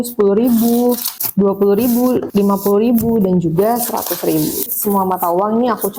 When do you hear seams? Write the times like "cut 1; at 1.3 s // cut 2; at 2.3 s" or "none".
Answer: cut 1; at 1.2 s // cut 2; at 2.3 s // cut 3; at 4.7 s